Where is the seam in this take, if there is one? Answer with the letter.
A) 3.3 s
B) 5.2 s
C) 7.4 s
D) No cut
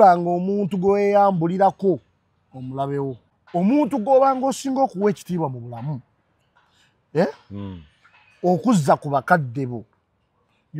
A